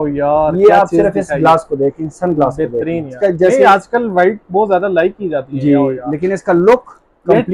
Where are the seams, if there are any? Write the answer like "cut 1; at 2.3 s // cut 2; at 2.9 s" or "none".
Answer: cut 1; at 3.1 s